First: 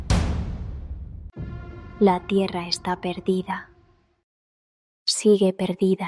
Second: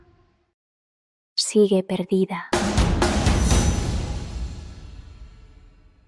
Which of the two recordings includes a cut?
first; 1 cut; at 1.7 s

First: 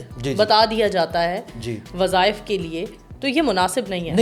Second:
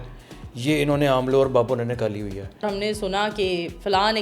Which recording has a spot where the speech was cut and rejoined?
second; 1 cut; at 2.7 s

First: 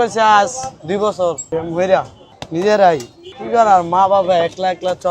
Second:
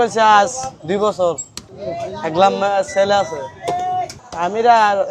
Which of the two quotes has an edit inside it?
first; 2 cuts; at 1.4 s, 2.2 s

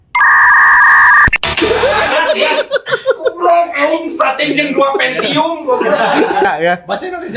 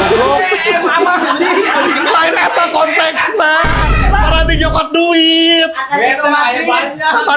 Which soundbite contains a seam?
first; 1 cut; at 6.4 s

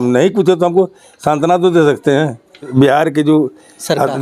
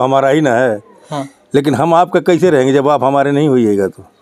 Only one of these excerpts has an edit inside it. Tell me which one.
first; 1 cut; at 2.7 s

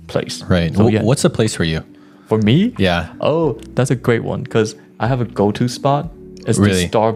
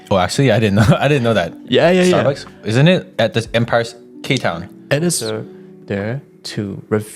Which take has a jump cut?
second; 1 cut; at 5.2 s

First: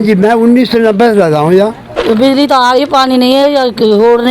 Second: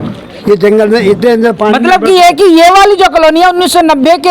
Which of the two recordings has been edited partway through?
first; 1 cut; at 1.9 s

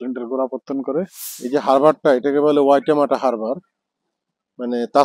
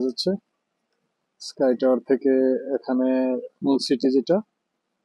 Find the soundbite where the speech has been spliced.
first; 1 cut; at 1.2 s

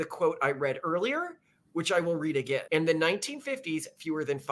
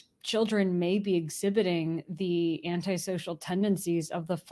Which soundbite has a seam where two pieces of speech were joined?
first; 1 cut; at 2.6 s

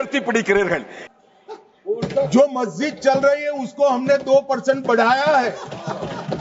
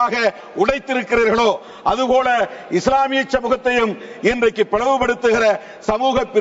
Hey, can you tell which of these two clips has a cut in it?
first; 1 cut; at 0.9 s

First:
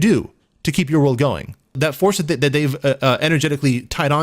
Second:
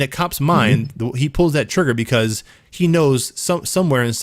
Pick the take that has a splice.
first; 1 cut; at 1.8 s

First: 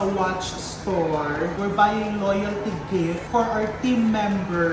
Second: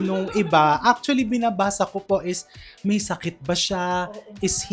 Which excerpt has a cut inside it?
first; 2 cuts; at 1.5 s, 3.2 s

